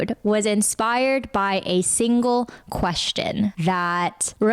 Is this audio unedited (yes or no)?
no